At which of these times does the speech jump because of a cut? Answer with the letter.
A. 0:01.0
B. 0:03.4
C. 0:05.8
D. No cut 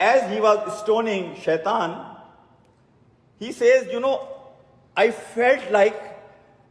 D